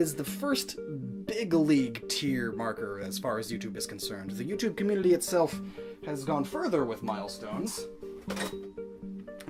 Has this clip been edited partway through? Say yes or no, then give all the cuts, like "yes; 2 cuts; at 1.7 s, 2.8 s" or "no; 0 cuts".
no; 0 cuts